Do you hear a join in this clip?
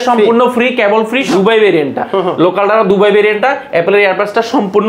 yes; 1 cut; at 1.3 s

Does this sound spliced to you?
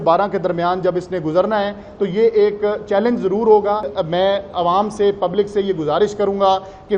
yes; 1 cut; at 3.9 s

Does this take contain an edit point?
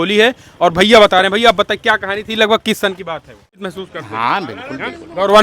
yes; 1 cut; at 3.5 s

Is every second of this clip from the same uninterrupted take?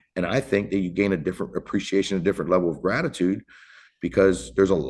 yes; 0 cuts

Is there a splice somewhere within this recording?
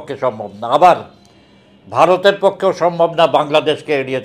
no; 0 cuts

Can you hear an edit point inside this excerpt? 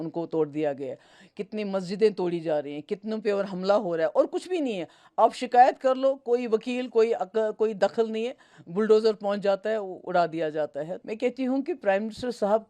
yes; 1 cut; at 11.0 s

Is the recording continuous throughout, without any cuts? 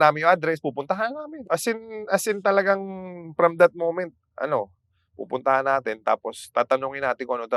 no; 1 cut; at 1.3 s

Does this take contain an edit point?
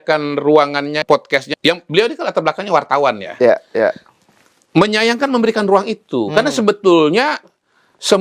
yes; 1 cut; at 1.2 s

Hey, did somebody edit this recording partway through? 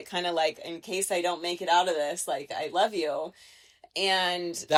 no; 0 cuts

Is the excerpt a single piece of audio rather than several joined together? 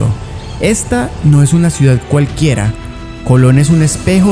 yes; 0 cuts

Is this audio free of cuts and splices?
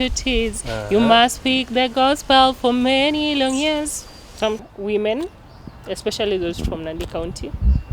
no; 1 cut; at 4.6 s

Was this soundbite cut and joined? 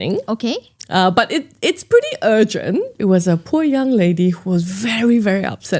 yes; 1 cut; at 2.9 s

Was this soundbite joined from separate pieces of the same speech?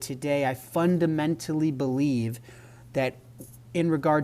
no; 0 cuts

